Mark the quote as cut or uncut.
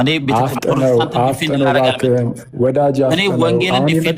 uncut